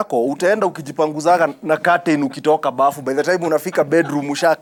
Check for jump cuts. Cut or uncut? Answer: uncut